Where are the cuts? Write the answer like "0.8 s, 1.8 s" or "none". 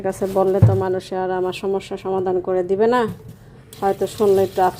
none